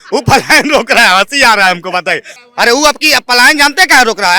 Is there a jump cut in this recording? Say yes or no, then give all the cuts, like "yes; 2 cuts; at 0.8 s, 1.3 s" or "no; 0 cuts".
yes; 1 cut; at 2.3 s